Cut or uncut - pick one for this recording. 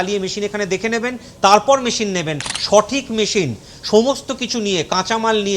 cut